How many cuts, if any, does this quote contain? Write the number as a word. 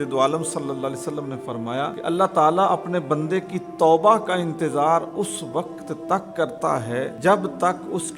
two